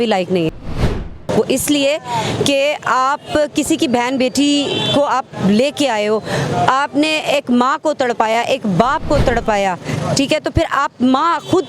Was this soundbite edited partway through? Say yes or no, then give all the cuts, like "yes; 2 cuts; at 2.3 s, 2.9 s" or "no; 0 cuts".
yes; 1 cut; at 0.9 s